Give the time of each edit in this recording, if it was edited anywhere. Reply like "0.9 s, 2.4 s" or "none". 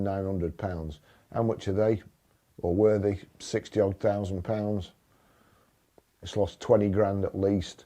none